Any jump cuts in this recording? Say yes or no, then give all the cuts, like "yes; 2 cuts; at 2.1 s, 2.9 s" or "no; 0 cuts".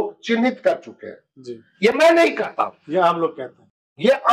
no; 0 cuts